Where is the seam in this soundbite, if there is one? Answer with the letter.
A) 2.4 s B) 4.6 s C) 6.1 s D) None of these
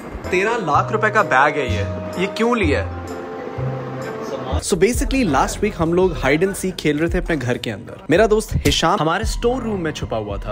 B